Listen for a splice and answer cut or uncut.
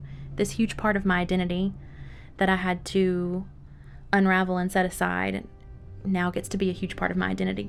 uncut